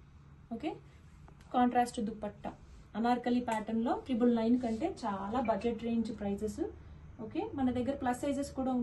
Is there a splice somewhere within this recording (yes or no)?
no